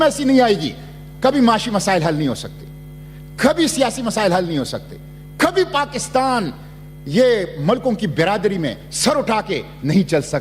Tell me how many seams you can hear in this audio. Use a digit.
0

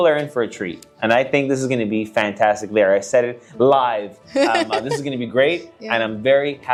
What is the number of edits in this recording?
0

